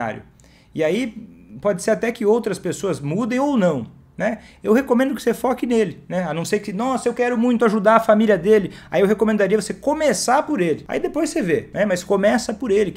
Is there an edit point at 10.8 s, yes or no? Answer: yes